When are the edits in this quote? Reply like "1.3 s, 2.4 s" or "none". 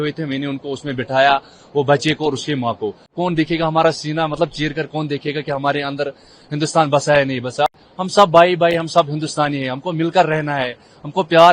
3.1 s, 7.7 s